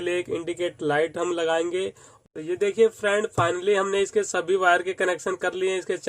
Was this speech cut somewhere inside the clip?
yes; 1 cut; at 2.1 s

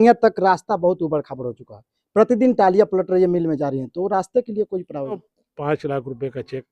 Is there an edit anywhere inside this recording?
yes; 1 cut; at 5.3 s

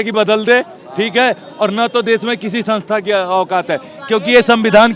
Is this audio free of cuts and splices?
yes; 0 cuts

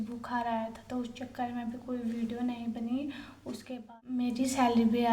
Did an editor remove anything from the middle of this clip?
yes; 1 cut; at 4.2 s

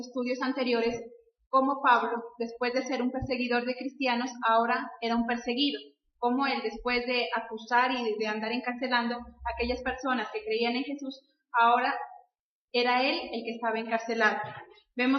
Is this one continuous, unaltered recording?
yes; 0 cuts

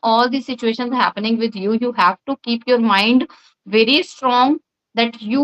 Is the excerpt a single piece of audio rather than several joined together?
yes; 0 cuts

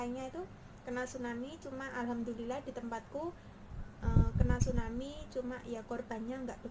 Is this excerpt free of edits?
yes; 0 cuts

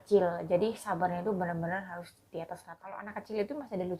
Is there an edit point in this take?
yes; 1 cut; at 3.1 s

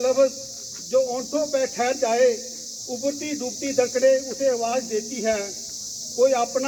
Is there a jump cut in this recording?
no; 0 cuts

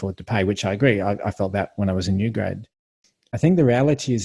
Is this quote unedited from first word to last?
no; 1 cut; at 3.0 s

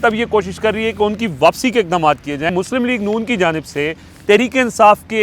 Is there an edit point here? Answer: yes; 1 cut; at 2.5 s

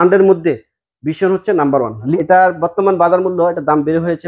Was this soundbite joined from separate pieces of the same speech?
yes; 1 cut; at 2.1 s

